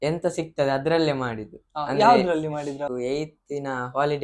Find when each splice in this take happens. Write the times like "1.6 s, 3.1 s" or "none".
2.9 s